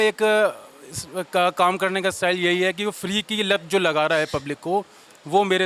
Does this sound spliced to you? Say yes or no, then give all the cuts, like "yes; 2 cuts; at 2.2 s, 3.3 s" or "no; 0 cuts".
no; 0 cuts